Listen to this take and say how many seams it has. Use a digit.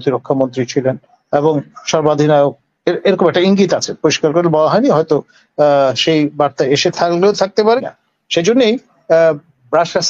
1